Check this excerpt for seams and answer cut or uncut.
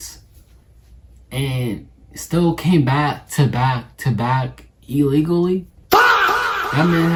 uncut